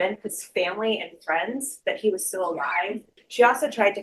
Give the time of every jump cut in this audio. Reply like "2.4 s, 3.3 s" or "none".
3.1 s

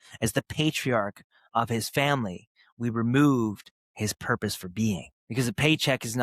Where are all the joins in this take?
5.2 s

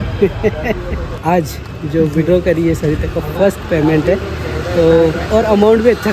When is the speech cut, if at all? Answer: 1.1 s

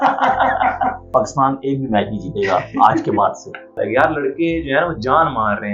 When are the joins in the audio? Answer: 1.0 s, 3.8 s

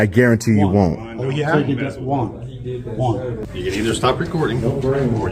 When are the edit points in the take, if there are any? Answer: 3.4 s

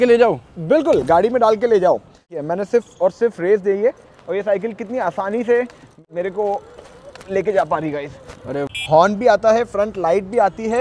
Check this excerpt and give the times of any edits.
2.3 s, 5.9 s, 8.7 s

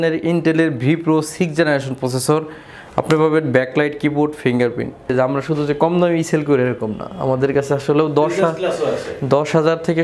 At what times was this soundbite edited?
5.1 s

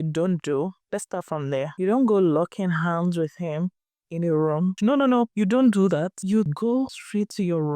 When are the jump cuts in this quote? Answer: 5.0 s, 6.6 s

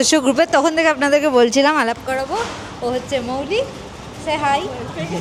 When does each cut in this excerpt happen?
none

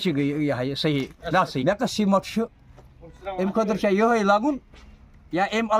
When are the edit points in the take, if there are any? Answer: 1.6 s

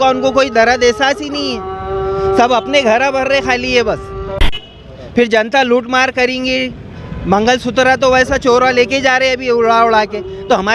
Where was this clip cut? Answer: 4.5 s

